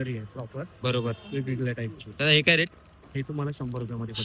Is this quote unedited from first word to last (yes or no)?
yes